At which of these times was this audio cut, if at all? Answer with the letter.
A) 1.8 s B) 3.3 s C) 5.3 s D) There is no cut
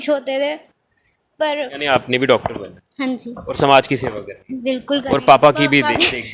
A